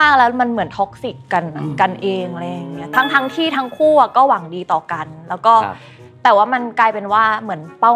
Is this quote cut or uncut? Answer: uncut